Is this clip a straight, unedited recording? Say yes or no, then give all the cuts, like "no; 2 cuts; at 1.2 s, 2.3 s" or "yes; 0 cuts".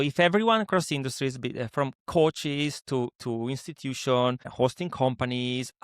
no; 2 cuts; at 2.0 s, 4.5 s